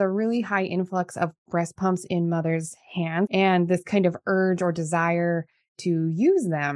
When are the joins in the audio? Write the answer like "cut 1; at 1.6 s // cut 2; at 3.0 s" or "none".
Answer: cut 1; at 3.3 s